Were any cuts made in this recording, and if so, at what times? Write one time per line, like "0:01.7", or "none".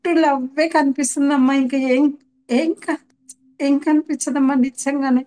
none